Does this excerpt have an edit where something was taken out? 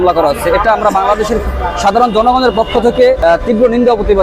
yes; 1 cut; at 3.2 s

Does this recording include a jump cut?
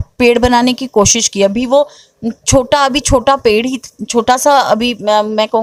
no; 0 cuts

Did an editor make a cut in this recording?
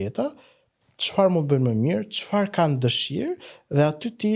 no; 0 cuts

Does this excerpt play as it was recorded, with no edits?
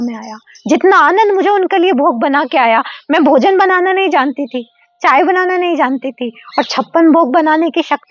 yes; 0 cuts

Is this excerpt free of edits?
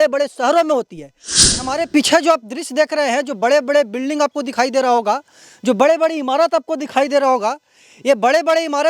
no; 1 cut; at 1.5 s

